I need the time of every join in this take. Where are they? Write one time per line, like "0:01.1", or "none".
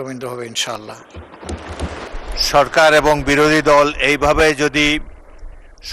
0:02.1